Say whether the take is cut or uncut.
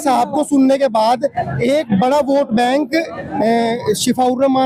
uncut